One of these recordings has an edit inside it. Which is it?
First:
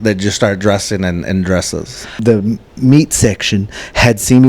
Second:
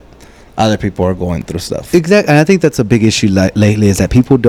first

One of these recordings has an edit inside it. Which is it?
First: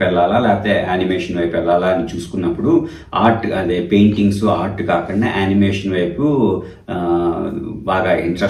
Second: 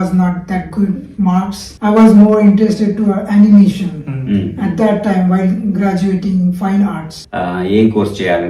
second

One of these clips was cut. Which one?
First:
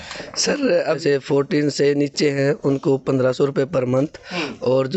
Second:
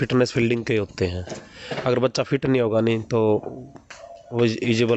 first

